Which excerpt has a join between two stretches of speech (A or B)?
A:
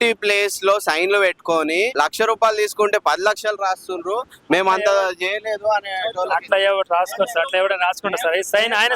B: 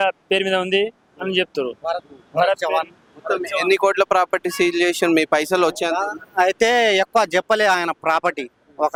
A